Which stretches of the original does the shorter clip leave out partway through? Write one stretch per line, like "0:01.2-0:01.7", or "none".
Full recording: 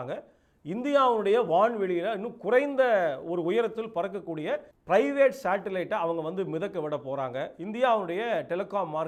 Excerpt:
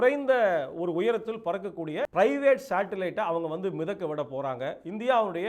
0:04.6-0:04.8